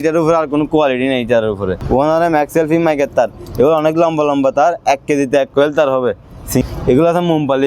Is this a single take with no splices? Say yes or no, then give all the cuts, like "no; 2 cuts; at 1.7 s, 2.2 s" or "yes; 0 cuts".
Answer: no; 2 cuts; at 1.8 s, 6.6 s